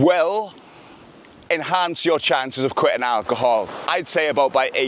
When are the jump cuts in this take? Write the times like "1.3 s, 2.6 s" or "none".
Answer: none